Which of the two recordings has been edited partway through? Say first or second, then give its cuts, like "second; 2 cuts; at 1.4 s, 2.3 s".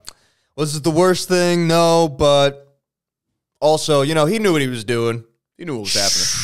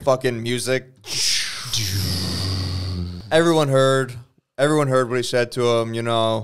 second; 1 cut; at 3.2 s